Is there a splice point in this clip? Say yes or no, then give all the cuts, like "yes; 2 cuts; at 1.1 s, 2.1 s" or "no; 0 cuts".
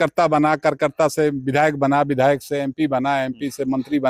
no; 0 cuts